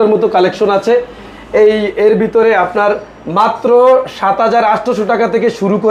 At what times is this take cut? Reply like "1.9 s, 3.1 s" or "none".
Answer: none